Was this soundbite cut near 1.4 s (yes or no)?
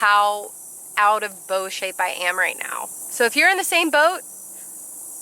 no